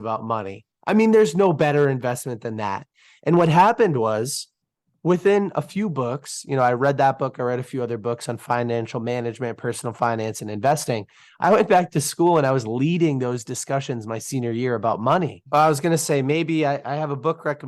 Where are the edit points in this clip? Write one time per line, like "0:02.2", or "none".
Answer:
0:15.4